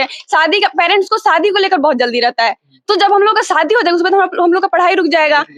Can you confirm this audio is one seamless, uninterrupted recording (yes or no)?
yes